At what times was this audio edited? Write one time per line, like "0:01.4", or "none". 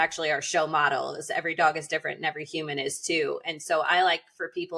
none